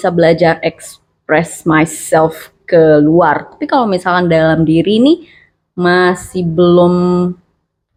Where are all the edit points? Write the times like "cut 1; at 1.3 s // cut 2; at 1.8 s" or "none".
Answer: none